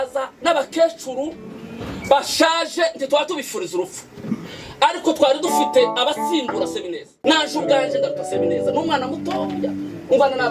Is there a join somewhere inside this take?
yes; 1 cut; at 7.1 s

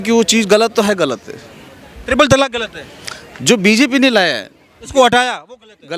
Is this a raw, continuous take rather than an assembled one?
yes; 0 cuts

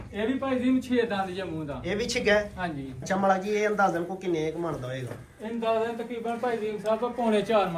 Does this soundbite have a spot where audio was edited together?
yes; 1 cut; at 3.0 s

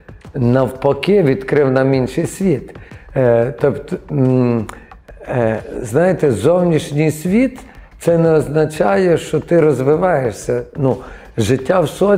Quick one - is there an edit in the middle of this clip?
no; 0 cuts

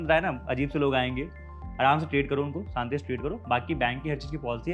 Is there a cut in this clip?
no; 0 cuts

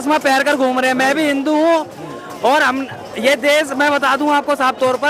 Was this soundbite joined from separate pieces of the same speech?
no; 0 cuts

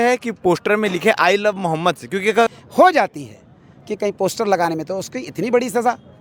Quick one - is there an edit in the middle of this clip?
yes; 1 cut; at 2.6 s

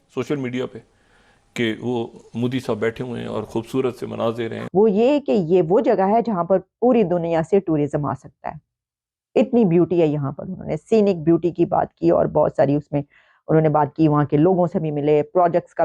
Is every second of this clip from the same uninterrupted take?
no; 1 cut; at 4.6 s

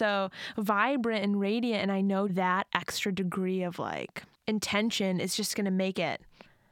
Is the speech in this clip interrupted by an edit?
yes; 1 cut; at 2.3 s

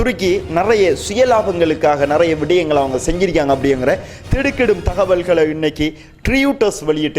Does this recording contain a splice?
no; 0 cuts

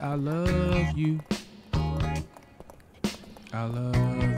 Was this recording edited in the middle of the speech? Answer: no; 0 cuts

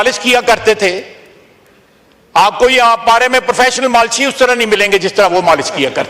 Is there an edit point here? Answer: no; 0 cuts

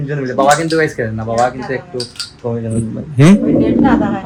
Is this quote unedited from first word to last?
yes; 0 cuts

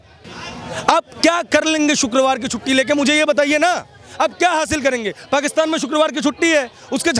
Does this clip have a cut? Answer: no; 0 cuts

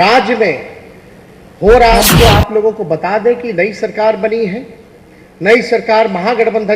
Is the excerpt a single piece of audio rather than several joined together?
no; 1 cut; at 2.1 s

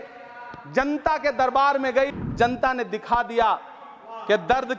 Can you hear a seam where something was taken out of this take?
yes; 1 cut; at 2.1 s

